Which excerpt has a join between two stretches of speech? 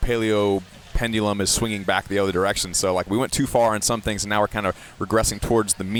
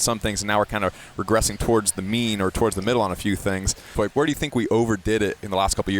second; 1 cut; at 3.9 s

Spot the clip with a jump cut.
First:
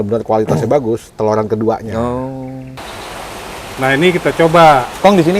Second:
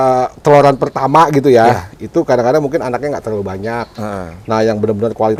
first; 1 cut; at 2.8 s

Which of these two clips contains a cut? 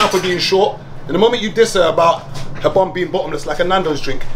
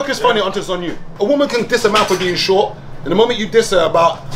second; 1 cut; at 1.0 s

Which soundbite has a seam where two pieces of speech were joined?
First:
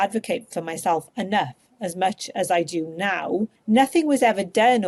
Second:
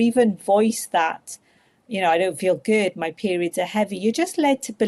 first; 1 cut; at 3.6 s

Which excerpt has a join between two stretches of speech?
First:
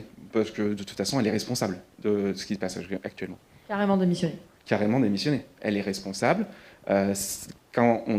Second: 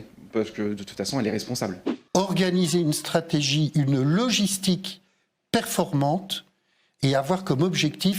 second; 1 cut; at 1.9 s

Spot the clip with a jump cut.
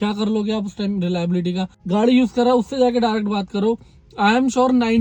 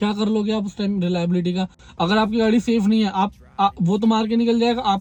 first; 1 cut; at 1.7 s

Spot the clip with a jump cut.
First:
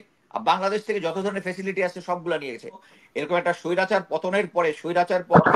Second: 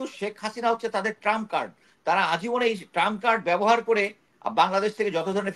first; 1 cut; at 2.9 s

